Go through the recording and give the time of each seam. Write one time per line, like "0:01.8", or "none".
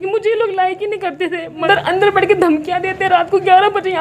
0:01.6